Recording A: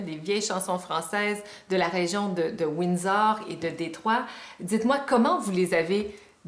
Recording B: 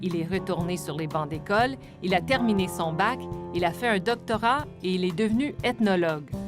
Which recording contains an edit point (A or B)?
B